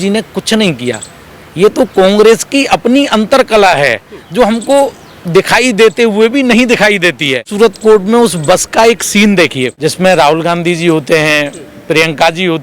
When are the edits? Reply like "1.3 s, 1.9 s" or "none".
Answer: 7.5 s, 9.7 s